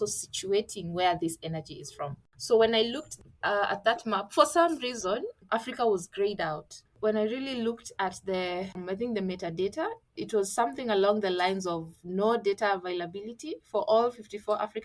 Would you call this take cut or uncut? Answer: cut